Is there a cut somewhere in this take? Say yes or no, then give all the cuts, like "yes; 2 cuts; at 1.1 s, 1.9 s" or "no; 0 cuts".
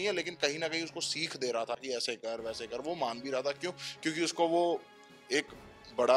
no; 0 cuts